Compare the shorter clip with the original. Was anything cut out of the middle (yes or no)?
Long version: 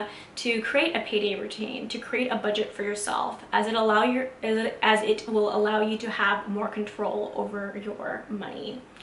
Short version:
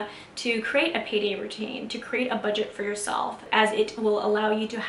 yes